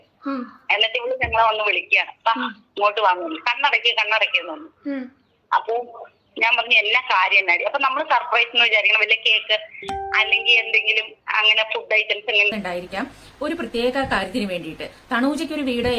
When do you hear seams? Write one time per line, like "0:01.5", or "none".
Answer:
0:12.5